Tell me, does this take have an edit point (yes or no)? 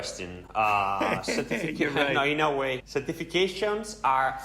yes